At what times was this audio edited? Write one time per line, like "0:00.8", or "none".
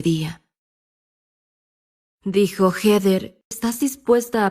0:03.5